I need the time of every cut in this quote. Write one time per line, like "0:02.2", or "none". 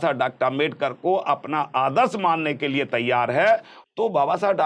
0:03.7